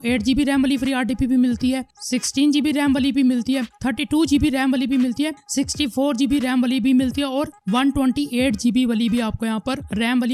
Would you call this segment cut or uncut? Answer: uncut